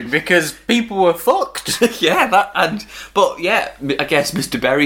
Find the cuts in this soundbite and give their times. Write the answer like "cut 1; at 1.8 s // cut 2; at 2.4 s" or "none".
none